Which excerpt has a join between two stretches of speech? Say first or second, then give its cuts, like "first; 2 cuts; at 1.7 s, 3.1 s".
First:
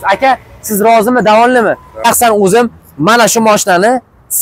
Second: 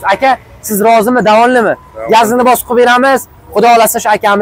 first; 1 cut; at 2.1 s